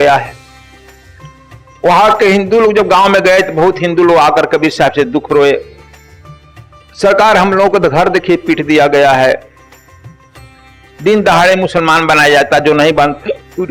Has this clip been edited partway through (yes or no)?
no